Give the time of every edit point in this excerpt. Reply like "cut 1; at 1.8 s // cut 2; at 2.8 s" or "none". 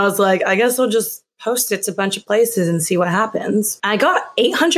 cut 1; at 3.7 s